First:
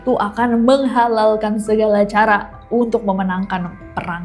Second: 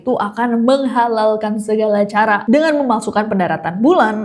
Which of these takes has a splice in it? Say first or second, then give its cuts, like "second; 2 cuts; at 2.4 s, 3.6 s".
second; 1 cut; at 2.4 s